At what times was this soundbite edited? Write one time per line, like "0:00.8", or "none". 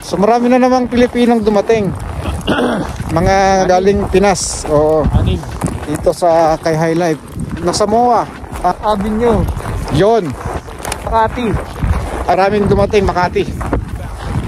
0:07.6
0:08.7
0:11.1
0:12.4

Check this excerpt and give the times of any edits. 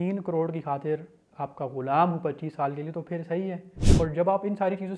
0:03.7

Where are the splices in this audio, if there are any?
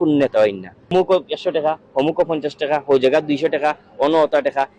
0:00.9

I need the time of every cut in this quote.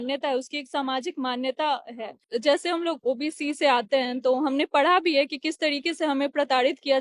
0:02.2

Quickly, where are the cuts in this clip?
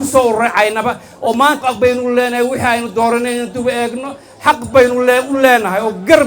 0:01.6

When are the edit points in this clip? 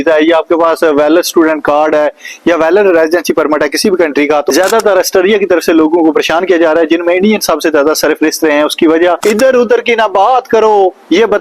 0:04.5
0:09.2

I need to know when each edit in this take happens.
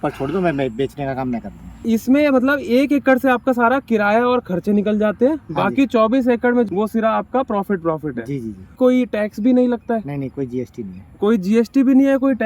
0:01.7
0:06.7
0:08.8

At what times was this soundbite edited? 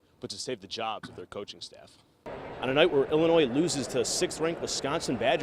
0:02.4

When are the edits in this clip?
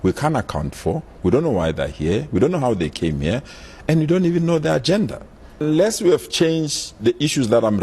0:05.6

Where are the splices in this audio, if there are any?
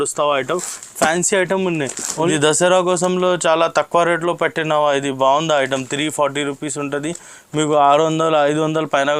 0:02.3

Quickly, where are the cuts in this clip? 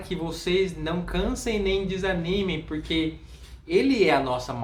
none

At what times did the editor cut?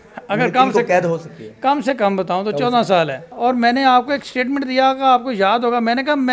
0:03.3

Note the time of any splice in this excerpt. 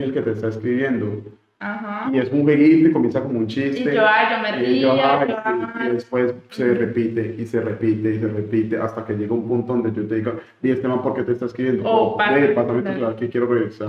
none

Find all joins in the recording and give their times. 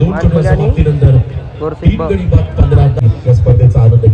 0:03.0

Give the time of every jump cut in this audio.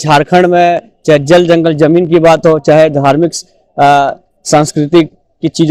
none

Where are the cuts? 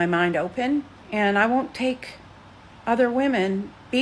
0:01.0

